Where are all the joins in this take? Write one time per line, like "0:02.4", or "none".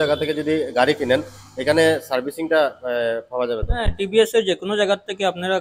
none